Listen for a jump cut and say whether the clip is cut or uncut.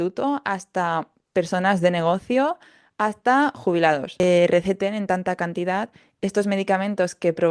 cut